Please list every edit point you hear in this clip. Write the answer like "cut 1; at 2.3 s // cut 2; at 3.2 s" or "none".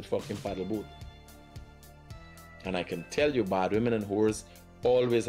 cut 1; at 0.9 s // cut 2; at 2.6 s